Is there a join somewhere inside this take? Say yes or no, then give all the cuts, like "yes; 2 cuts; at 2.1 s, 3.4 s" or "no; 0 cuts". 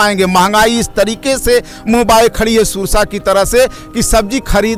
no; 0 cuts